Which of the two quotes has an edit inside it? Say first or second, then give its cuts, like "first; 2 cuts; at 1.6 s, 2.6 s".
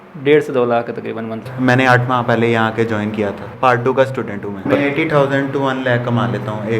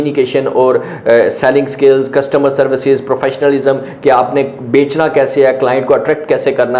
first; 3 cuts; at 1.5 s, 3.5 s, 4.6 s